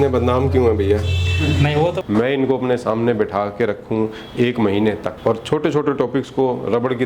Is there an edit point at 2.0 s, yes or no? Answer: yes